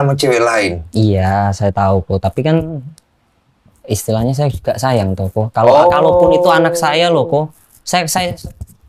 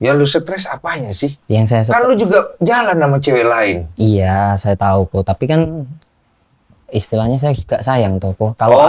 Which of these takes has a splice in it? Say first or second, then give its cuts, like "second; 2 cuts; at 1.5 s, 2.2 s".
second; 1 cut; at 1.4 s